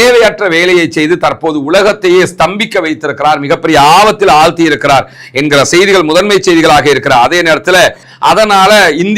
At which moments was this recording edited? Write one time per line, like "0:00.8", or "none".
0:08.0